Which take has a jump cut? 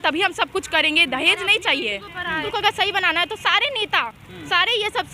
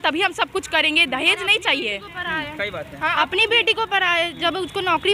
first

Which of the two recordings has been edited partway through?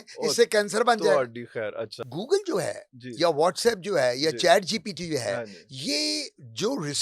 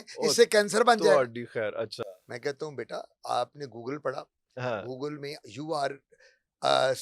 first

